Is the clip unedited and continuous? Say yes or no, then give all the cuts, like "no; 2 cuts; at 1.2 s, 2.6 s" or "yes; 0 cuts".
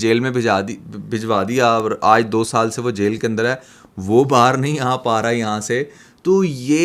yes; 0 cuts